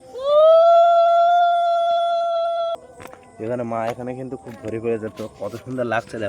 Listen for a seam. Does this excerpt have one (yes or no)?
yes